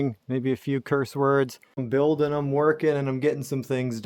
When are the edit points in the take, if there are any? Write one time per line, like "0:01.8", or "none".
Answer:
0:01.8